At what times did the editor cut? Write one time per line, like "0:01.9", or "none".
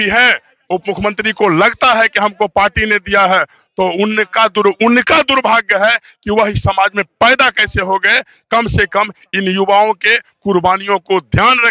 none